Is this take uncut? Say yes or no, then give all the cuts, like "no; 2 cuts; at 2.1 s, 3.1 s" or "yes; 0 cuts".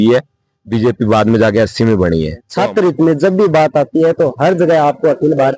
no; 1 cut; at 2.5 s